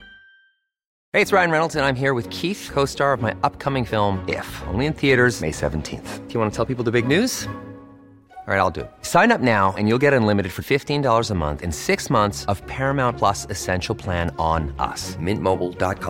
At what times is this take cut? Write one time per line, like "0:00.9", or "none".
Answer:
0:00.9

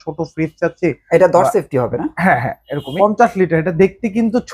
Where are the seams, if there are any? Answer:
0:02.9

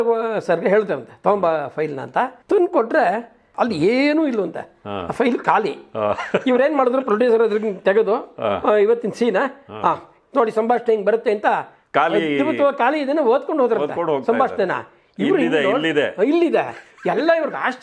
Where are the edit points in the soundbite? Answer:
0:02.4
0:03.4
0:11.8

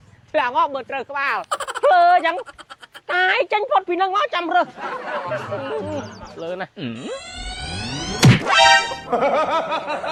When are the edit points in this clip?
none

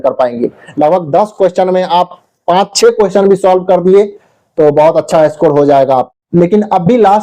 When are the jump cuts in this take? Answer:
0:06.1

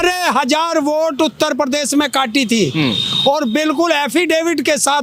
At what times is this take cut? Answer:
none

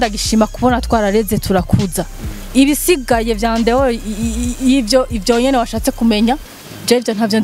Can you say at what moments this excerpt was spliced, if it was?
none

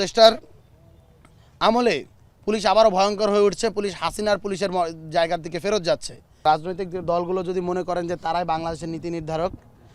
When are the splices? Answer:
0:06.4

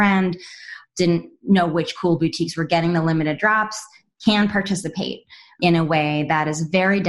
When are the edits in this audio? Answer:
none

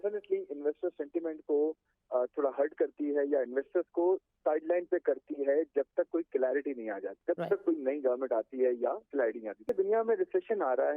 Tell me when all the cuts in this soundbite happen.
0:07.2
0:09.7

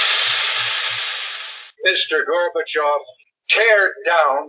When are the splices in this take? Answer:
0:01.4

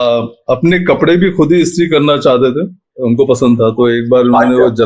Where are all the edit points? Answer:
none

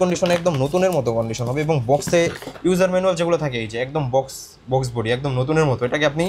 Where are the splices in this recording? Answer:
none

